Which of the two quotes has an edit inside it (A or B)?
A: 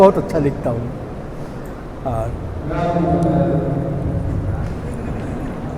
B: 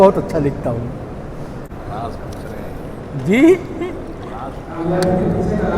B